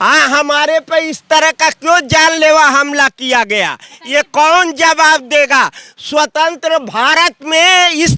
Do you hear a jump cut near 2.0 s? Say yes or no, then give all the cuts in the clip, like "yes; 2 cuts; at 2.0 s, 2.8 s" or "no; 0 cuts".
no; 0 cuts